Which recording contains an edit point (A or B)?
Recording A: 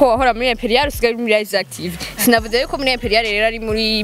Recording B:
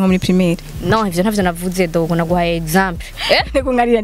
B